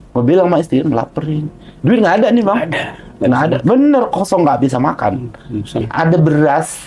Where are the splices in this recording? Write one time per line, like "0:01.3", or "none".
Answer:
0:05.8